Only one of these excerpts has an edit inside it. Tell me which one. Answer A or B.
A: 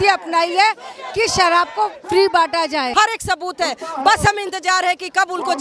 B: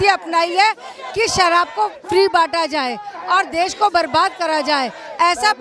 A